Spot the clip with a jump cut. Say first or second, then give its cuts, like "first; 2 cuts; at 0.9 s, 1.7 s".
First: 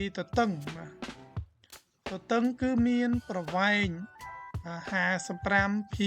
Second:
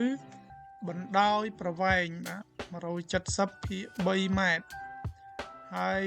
first; 2 cuts; at 0.9 s, 2.1 s